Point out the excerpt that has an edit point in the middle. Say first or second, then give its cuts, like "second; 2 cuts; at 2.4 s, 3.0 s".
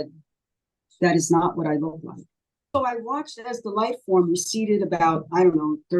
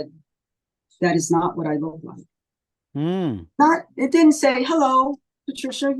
first; 1 cut; at 2.7 s